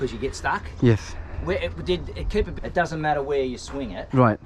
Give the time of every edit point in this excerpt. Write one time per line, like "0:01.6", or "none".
0:02.5

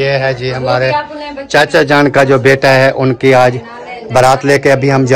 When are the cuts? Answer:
none

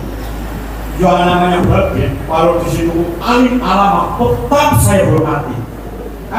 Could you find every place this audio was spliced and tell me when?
none

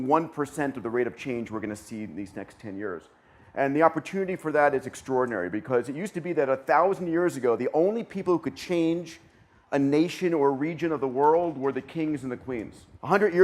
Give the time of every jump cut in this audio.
0:09.5

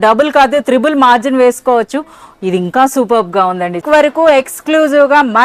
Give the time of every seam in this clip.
0:03.8

